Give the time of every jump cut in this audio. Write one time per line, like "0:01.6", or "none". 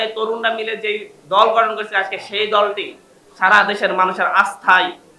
none